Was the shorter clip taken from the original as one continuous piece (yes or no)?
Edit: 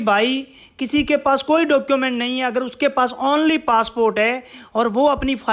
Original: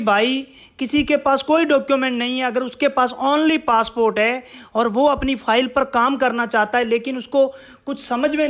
yes